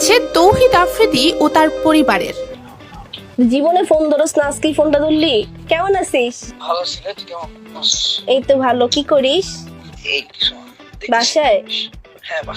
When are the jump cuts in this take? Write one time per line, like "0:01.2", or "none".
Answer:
0:02.4